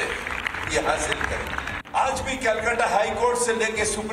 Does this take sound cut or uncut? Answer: cut